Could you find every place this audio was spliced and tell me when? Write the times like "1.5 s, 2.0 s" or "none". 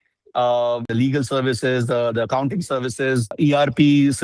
0.9 s, 3.3 s